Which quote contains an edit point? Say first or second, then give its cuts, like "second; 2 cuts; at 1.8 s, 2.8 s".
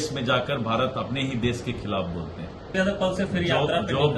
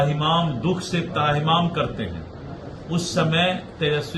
first; 1 cut; at 2.7 s